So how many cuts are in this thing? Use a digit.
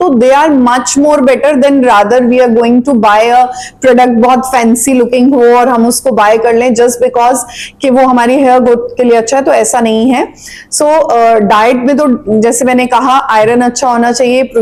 0